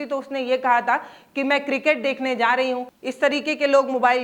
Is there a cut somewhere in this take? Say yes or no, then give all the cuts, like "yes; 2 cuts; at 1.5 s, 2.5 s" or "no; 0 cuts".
yes; 1 cut; at 2.9 s